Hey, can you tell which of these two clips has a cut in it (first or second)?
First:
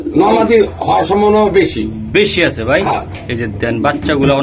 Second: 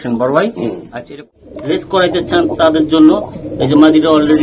second